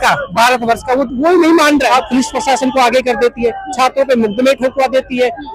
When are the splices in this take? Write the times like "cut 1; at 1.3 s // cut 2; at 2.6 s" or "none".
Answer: cut 1; at 1.9 s